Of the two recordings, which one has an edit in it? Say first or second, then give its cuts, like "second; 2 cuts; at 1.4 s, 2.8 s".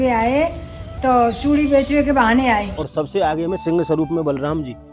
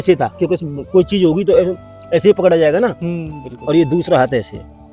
first; 1 cut; at 2.8 s